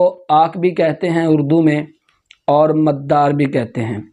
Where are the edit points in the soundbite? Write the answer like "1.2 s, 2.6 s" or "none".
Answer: none